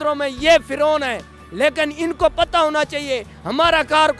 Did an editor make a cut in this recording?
no; 0 cuts

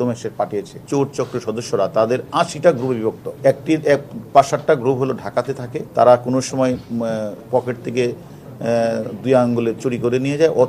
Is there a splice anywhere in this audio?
yes; 3 cuts; at 0.8 s, 3.3 s, 5.7 s

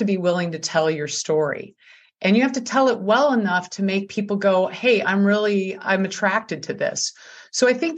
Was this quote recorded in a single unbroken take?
yes; 0 cuts

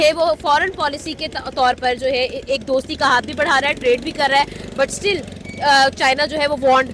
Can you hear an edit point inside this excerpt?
no; 0 cuts

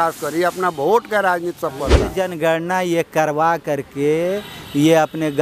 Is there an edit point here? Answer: yes; 1 cut; at 2.1 s

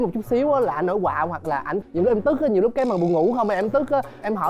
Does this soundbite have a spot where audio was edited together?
yes; 1 cut; at 1.8 s

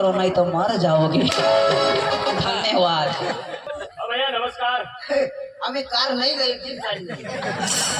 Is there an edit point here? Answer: yes; 1 cut; at 3.7 s

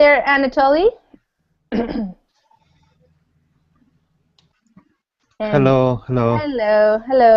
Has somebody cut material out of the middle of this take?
no; 0 cuts

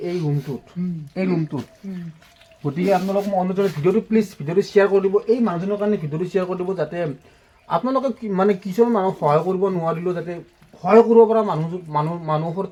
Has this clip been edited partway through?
no; 0 cuts

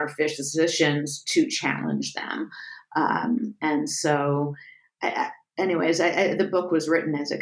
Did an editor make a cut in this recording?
no; 0 cuts

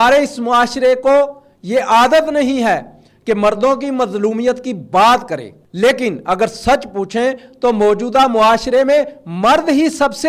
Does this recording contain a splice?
no; 0 cuts

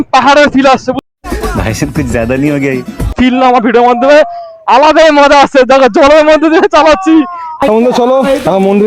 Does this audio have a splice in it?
yes; 3 cuts; at 1.0 s, 3.1 s, 7.5 s

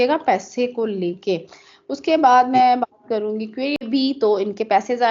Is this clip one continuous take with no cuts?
no; 1 cut; at 3.8 s

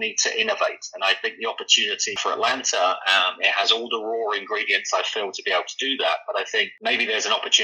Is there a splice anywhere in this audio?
yes; 1 cut; at 2.2 s

